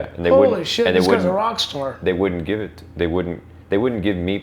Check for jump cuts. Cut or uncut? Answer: uncut